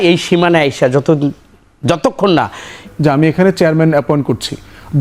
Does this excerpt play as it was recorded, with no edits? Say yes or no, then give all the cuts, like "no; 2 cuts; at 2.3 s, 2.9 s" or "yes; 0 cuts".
no; 1 cut; at 2.9 s